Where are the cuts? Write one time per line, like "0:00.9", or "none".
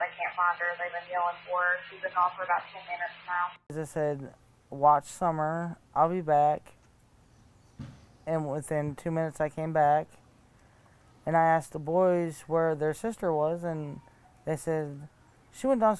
0:03.7